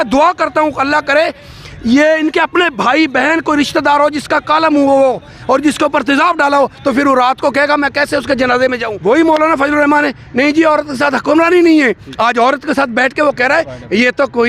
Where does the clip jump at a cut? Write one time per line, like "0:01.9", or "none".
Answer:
0:08.9